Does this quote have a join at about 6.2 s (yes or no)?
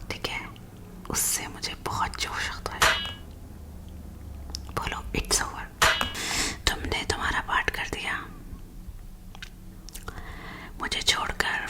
yes